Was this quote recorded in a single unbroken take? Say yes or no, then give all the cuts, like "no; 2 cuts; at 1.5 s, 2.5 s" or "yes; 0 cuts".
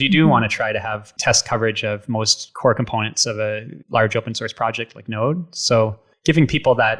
no; 4 cuts; at 1.1 s, 2.4 s, 3.7 s, 6.1 s